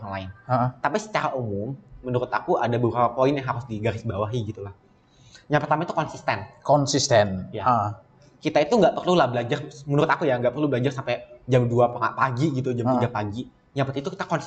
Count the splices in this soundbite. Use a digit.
0